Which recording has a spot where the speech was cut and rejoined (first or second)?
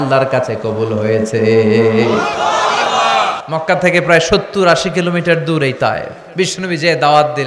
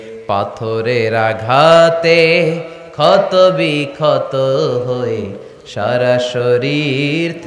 first